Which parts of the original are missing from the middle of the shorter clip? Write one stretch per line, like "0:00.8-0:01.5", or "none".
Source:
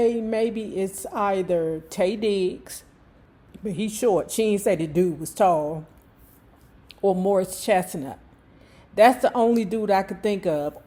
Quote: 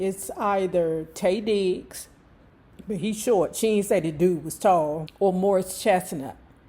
0:05.8-0:06.9